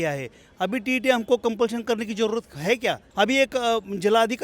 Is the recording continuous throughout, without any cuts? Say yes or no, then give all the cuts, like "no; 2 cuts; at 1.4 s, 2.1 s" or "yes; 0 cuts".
no; 1 cut; at 3.0 s